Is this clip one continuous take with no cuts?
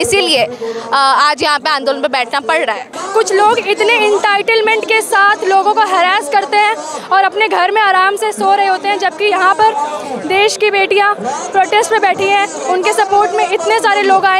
no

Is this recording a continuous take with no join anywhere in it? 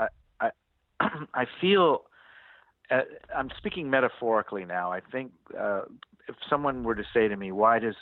yes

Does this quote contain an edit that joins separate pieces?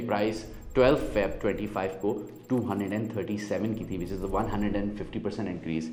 no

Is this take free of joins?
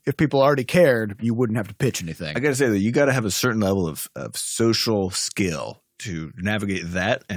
yes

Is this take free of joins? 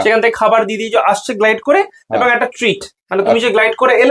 yes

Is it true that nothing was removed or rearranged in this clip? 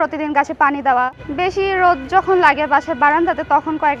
no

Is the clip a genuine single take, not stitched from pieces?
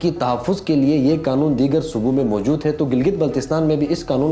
yes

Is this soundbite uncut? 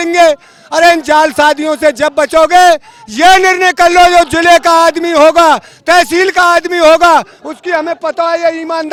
yes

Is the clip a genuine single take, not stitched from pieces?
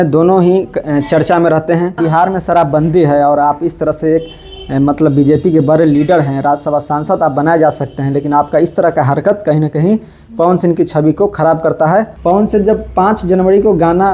no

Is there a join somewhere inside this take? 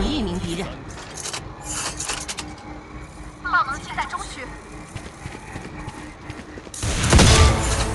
no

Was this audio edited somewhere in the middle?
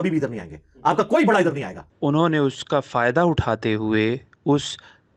no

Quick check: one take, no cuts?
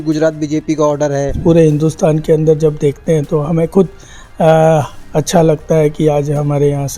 no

